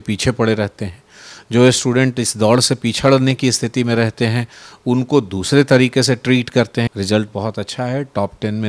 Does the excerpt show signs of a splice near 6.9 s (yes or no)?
yes